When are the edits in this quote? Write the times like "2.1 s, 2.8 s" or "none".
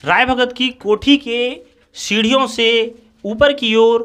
none

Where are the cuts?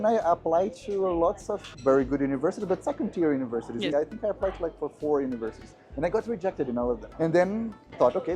3.9 s, 7.1 s

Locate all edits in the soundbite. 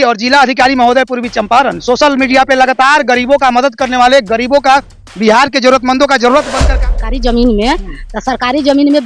6.8 s

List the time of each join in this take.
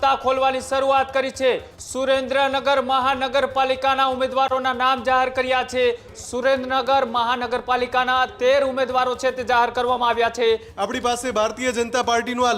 1.7 s, 6.1 s, 10.7 s

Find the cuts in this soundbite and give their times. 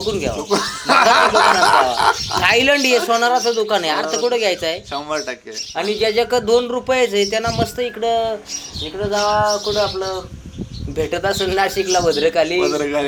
none

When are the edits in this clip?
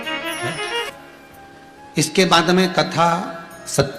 0.9 s

